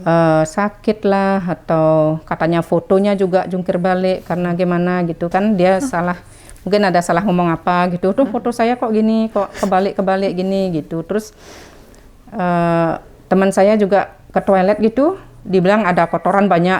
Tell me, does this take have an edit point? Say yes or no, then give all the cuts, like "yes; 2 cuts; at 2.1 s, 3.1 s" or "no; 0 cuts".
no; 0 cuts